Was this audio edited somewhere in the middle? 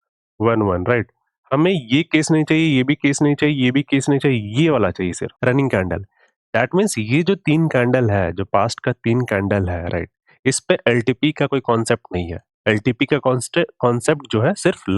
yes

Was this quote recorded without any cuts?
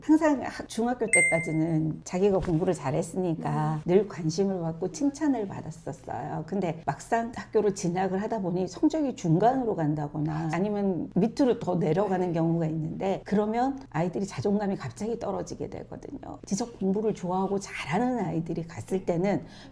no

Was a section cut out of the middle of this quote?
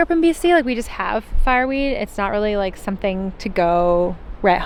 no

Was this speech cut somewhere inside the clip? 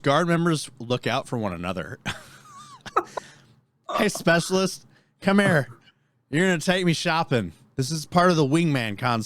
no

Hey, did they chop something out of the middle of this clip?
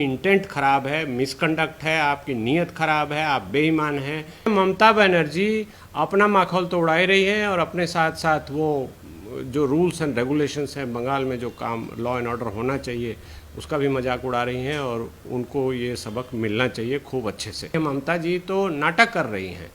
yes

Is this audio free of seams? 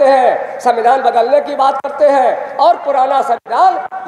yes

